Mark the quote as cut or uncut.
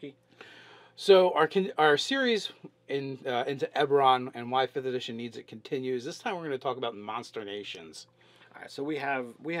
cut